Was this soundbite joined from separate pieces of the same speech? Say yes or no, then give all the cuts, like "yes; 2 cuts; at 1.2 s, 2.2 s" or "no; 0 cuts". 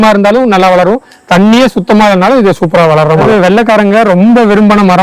yes; 1 cut; at 3.2 s